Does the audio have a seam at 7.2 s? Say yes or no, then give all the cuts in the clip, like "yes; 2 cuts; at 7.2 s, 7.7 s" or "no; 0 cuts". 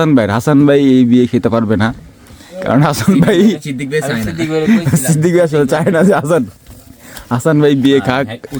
no; 0 cuts